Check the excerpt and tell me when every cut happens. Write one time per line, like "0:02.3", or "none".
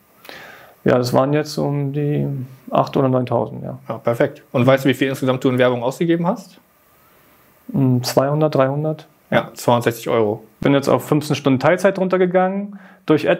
0:10.5